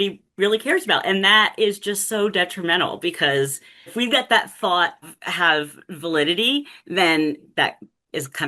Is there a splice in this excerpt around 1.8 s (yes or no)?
no